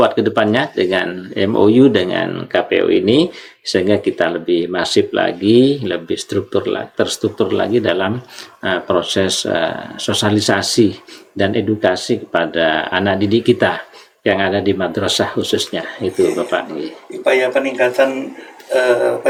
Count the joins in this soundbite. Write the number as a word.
zero